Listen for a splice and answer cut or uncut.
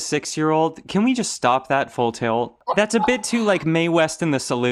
uncut